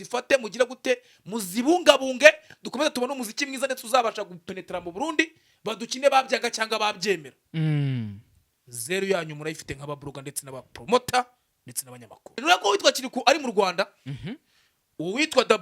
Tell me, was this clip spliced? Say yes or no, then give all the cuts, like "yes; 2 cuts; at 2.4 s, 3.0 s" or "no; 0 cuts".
yes; 1 cut; at 12.4 s